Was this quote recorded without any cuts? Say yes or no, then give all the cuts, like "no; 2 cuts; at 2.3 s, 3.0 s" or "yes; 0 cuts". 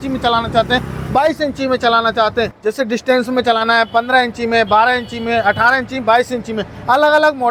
yes; 0 cuts